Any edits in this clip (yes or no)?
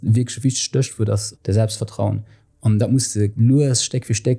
yes